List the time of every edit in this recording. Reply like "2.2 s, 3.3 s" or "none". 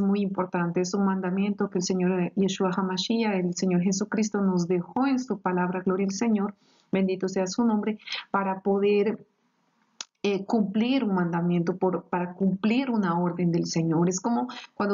none